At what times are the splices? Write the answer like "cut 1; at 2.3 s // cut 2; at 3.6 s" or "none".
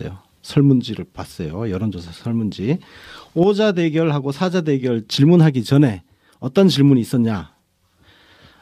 cut 1; at 6.7 s